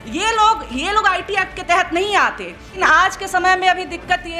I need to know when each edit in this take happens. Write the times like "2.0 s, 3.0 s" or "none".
2.7 s